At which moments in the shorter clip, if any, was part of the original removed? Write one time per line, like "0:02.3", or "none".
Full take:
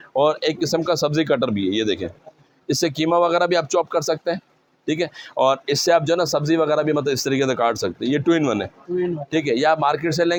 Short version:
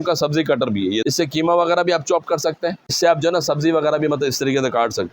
0:01.0
0:03.0